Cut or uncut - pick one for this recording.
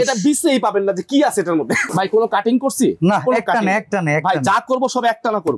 cut